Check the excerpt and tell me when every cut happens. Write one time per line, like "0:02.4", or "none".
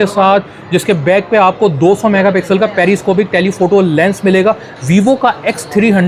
none